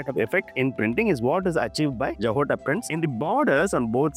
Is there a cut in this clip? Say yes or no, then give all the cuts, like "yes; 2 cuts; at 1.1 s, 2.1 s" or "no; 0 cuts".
no; 0 cuts